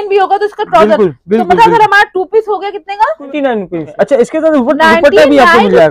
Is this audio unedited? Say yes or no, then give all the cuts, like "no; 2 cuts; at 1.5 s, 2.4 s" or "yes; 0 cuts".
no; 1 cut; at 3.3 s